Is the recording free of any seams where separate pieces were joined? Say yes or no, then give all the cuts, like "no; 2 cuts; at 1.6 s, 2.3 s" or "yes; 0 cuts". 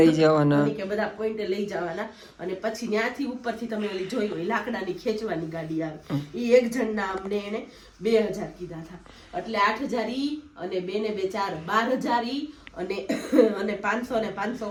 yes; 0 cuts